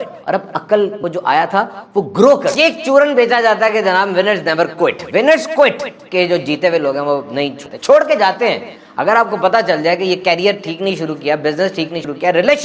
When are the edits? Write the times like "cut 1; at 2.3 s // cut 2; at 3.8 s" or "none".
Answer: cut 1; at 2.5 s